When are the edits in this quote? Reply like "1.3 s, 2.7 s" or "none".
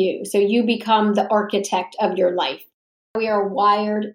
2.7 s

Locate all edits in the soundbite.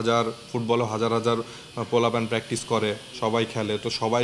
none

